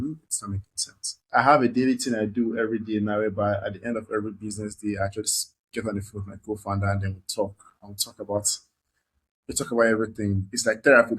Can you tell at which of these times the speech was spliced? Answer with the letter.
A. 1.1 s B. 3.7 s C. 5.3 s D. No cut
A